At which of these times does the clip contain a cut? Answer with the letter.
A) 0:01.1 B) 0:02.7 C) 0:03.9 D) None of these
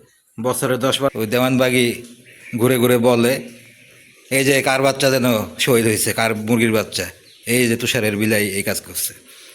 A